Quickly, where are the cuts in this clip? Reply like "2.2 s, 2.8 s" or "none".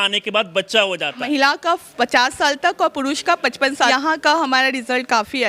1.2 s, 3.9 s